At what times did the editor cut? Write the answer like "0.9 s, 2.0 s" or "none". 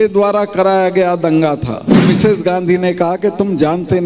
2.2 s

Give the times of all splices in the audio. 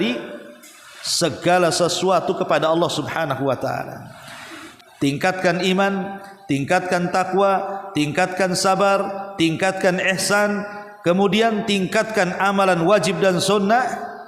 4.6 s

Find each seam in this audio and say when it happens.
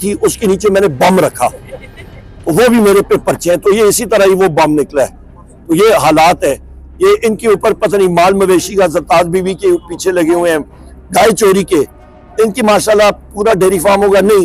none

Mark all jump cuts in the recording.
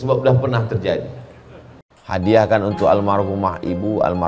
2.0 s

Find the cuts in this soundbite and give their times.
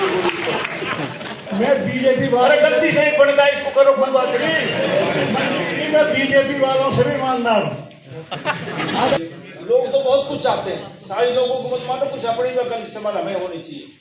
9.2 s

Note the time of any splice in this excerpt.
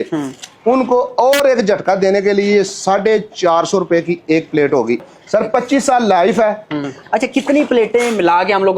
5.1 s, 7.0 s

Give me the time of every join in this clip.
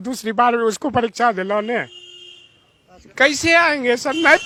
none

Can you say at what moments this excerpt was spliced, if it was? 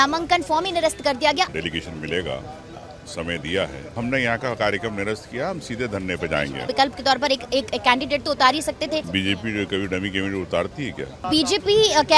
1.5 s, 4.0 s, 6.6 s, 9.1 s, 11.2 s

